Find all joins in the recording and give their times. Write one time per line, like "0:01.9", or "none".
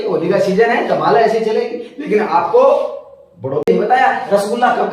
0:03.7